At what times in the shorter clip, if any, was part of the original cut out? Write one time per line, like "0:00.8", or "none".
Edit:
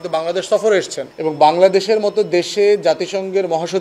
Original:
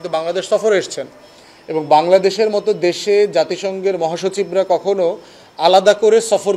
0:01.0